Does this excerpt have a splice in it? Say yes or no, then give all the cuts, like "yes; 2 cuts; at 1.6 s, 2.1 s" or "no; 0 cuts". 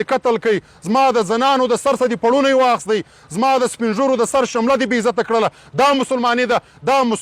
no; 0 cuts